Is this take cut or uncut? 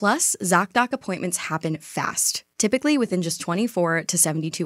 uncut